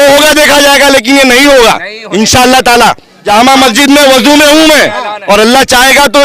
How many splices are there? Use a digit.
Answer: 1